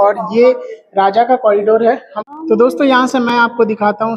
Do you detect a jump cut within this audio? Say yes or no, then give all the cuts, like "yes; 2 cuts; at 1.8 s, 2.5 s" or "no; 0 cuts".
yes; 1 cut; at 2.1 s